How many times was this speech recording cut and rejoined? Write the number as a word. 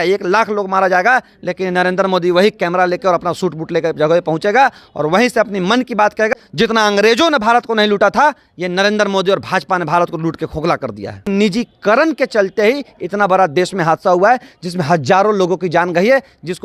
two